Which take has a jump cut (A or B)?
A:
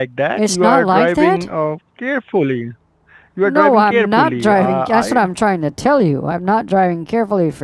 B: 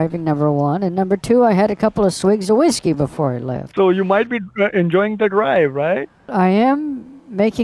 B